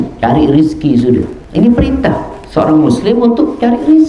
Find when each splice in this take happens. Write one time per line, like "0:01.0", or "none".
0:01.4